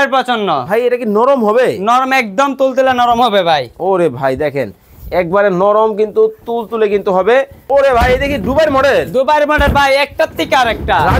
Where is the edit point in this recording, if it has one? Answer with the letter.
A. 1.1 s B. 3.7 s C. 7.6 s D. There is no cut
C